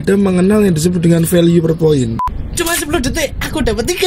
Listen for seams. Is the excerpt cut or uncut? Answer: cut